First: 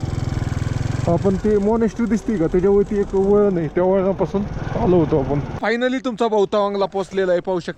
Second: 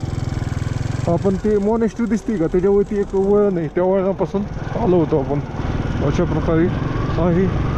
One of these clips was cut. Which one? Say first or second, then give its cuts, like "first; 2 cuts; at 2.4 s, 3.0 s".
first; 1 cut; at 5.8 s